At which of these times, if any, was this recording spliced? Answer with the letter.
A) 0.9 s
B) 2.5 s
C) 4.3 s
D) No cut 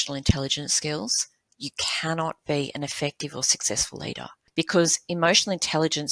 C